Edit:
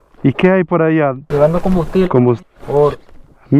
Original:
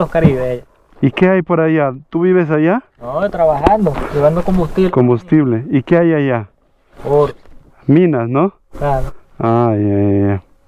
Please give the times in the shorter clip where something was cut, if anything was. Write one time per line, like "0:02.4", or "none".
0:01.2
0:02.4